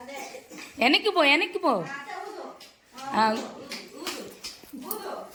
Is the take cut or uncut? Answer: uncut